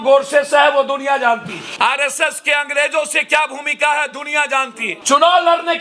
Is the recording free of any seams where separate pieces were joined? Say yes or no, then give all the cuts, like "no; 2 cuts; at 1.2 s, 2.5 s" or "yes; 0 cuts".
no; 2 cuts; at 1.6 s, 4.9 s